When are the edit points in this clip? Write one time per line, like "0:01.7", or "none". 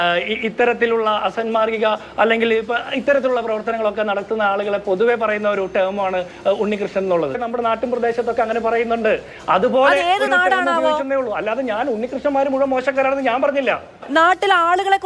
0:07.4
0:14.1